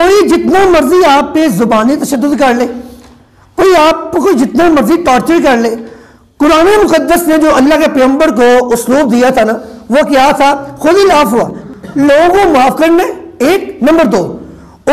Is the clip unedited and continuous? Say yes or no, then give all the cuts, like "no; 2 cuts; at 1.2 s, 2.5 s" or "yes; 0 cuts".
no; 1 cut; at 11.6 s